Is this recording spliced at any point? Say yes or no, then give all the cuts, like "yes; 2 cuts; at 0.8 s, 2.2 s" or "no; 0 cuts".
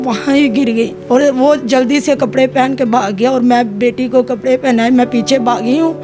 yes; 1 cut; at 1.0 s